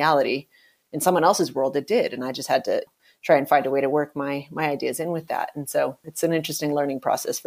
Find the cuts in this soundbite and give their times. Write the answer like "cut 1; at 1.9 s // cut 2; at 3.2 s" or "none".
cut 1; at 6.0 s